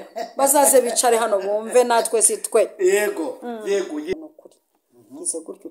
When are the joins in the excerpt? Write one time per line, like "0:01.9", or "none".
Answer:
0:04.1